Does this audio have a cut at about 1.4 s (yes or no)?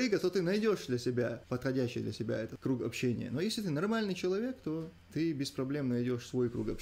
yes